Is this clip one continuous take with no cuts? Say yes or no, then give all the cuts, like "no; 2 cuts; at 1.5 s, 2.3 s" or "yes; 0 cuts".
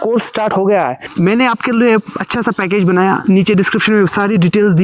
yes; 0 cuts